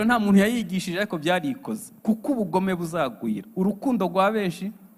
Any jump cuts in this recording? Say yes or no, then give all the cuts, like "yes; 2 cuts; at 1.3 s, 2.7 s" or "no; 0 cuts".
no; 0 cuts